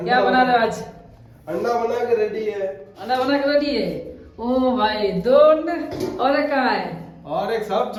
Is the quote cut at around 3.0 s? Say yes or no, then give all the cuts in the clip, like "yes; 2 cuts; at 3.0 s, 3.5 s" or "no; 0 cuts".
no; 0 cuts